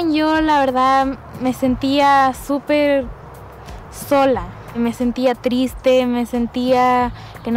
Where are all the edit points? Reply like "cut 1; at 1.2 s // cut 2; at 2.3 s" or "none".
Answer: cut 1; at 4.8 s